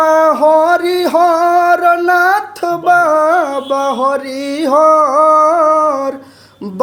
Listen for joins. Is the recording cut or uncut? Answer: uncut